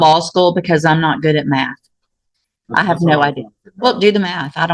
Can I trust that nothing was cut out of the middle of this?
yes; 0 cuts

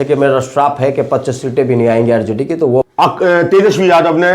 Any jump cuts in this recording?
yes; 1 cut; at 2.8 s

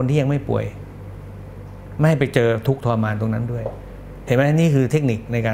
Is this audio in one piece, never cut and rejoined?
yes; 0 cuts

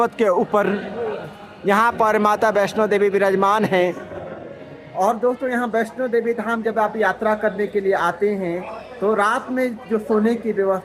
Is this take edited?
no; 0 cuts

